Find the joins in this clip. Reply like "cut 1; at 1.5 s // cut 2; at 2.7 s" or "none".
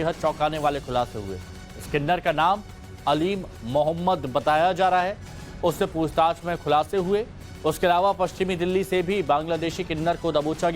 cut 1; at 6.8 s